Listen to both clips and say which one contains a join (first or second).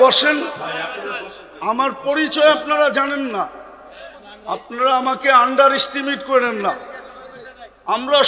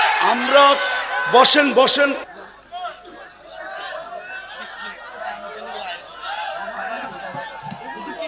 second